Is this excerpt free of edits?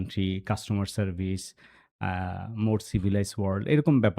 yes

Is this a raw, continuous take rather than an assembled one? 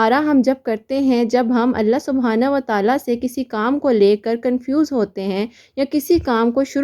yes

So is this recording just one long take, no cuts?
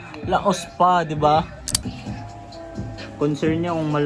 no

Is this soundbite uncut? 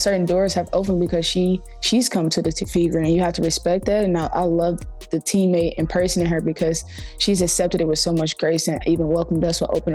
no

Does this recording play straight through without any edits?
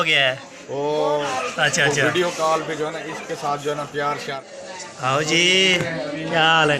no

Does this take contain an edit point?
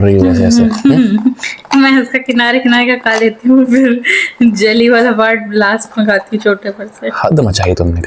no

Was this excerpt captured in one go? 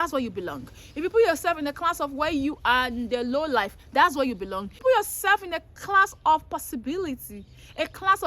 no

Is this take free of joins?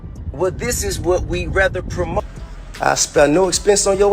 no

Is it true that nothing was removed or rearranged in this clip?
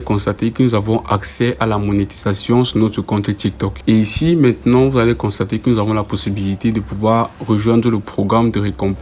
no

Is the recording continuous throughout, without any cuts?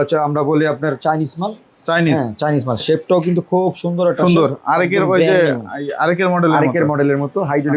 yes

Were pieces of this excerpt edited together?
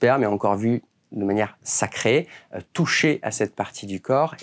no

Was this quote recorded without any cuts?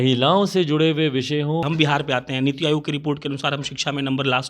no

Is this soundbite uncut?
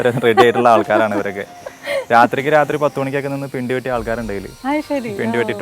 yes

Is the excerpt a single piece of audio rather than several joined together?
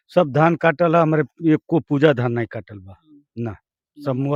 yes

